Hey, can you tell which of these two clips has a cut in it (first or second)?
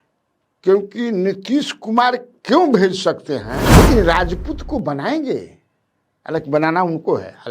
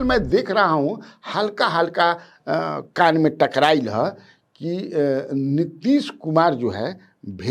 first